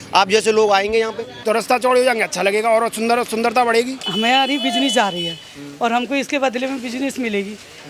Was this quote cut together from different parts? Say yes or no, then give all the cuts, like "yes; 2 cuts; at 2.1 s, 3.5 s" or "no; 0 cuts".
yes; 2 cuts; at 1.3 s, 4.0 s